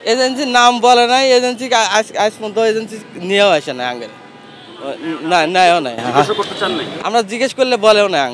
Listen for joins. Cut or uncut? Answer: uncut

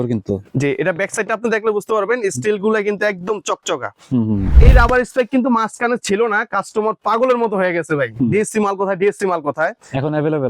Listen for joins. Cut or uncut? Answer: cut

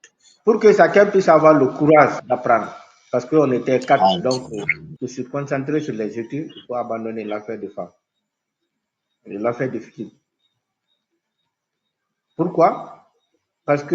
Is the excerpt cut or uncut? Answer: cut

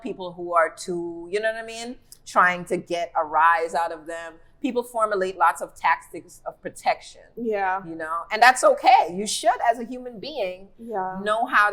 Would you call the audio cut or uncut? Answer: uncut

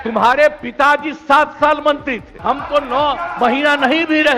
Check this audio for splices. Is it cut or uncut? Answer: cut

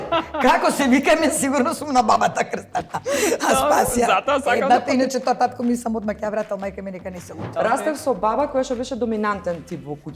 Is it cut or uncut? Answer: cut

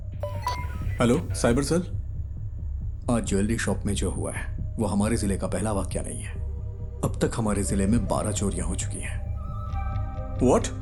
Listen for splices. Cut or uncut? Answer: uncut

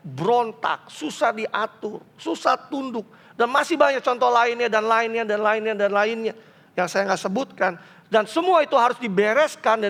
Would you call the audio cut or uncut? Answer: uncut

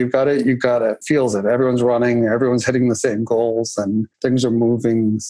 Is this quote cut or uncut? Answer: cut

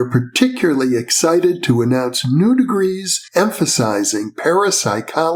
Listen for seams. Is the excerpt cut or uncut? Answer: uncut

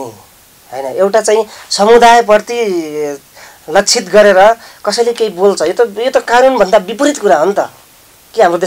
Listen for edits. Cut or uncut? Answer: uncut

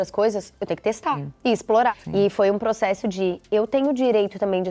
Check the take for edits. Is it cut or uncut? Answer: cut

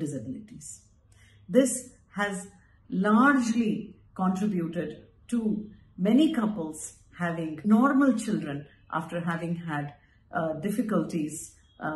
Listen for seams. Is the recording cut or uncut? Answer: cut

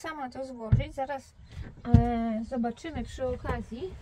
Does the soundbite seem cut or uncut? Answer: uncut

